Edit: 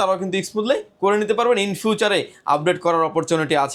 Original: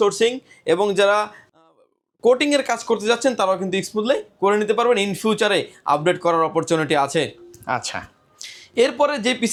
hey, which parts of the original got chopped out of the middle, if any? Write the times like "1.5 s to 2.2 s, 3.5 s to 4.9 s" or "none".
none